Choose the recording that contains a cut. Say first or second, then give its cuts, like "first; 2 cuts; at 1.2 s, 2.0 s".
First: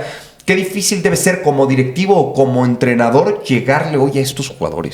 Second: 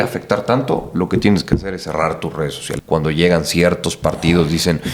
second; 1 cut; at 2.7 s